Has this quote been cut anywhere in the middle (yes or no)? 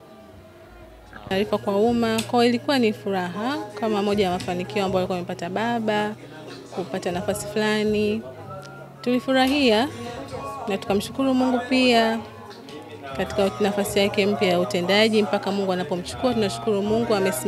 yes